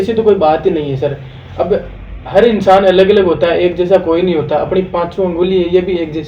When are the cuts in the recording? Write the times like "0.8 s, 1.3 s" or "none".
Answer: none